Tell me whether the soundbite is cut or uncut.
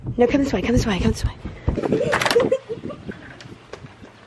cut